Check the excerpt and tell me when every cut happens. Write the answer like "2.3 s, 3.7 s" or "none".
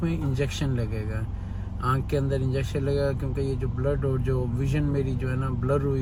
none